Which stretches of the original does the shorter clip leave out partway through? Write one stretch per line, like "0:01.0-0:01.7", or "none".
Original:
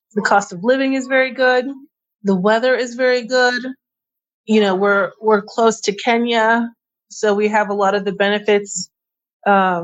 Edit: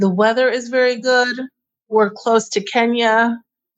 0:04.1-0:05.1